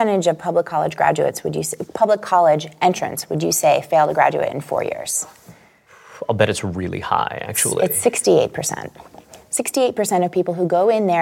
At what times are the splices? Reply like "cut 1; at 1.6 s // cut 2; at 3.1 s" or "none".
none